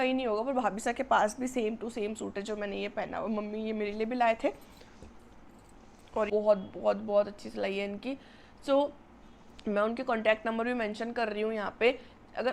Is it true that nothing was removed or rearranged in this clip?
no; 1 cut; at 6.3 s

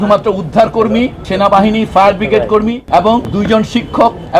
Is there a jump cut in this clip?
yes; 2 cuts; at 1.2 s, 3.0 s

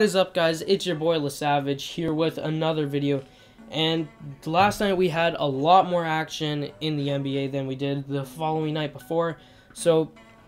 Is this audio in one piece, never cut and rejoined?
no; 1 cut; at 4.2 s

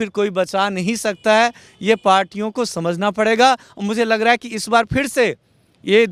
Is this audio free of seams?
yes; 0 cuts

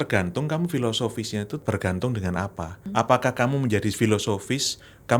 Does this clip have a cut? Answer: yes; 2 cuts; at 1.6 s, 2.9 s

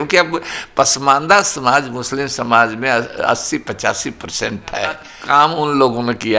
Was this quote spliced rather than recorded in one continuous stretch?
yes; 1 cut; at 5.1 s

